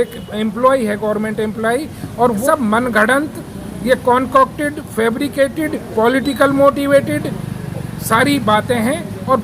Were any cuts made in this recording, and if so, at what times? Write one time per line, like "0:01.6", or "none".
0:02.4